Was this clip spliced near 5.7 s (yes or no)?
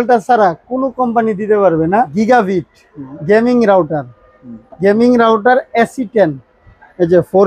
no